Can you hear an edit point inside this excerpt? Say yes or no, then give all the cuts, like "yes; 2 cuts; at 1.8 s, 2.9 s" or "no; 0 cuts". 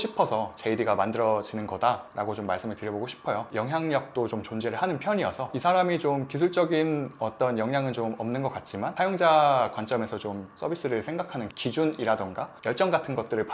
yes; 1 cut; at 3.5 s